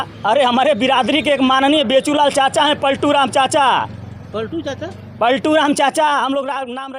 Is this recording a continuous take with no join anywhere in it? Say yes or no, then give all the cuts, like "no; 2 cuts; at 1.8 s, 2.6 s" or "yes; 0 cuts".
yes; 0 cuts